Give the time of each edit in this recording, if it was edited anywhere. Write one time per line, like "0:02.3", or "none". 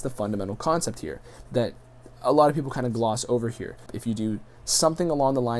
0:04.0